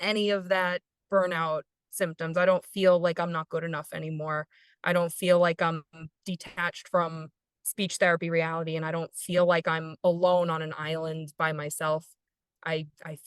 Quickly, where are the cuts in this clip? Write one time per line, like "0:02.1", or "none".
none